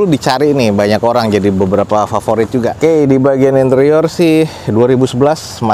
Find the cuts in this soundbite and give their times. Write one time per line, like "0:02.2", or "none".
0:02.7